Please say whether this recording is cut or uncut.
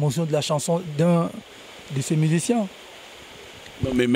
uncut